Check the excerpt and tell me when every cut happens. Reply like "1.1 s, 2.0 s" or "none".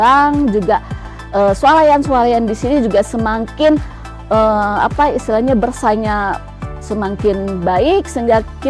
none